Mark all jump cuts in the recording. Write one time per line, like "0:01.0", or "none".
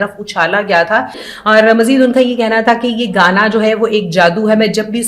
0:01.2